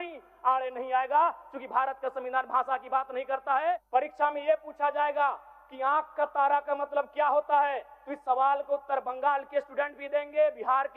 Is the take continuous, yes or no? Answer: no